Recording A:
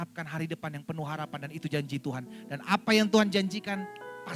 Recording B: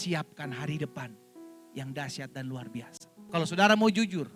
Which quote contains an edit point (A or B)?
B